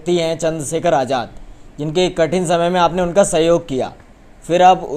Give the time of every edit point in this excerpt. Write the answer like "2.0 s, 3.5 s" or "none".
none